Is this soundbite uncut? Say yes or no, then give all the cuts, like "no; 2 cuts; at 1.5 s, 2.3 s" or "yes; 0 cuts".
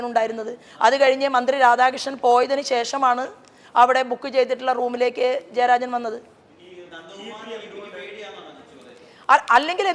yes; 0 cuts